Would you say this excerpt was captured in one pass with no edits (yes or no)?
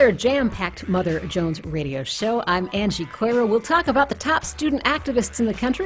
no